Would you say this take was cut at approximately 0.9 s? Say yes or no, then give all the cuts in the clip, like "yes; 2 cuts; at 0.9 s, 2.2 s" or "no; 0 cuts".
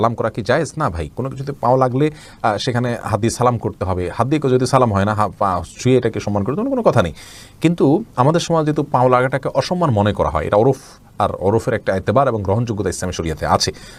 no; 0 cuts